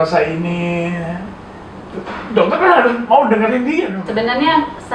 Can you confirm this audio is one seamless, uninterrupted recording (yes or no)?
no